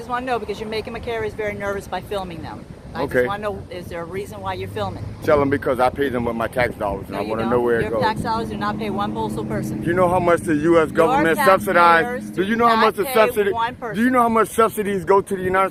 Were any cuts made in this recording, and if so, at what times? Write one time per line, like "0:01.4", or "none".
none